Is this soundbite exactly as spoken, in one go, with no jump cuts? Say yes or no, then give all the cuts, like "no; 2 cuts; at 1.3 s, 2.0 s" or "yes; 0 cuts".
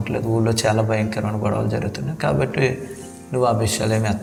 yes; 0 cuts